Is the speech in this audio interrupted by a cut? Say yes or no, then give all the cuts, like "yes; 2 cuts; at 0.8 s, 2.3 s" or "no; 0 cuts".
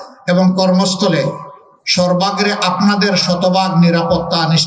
no; 0 cuts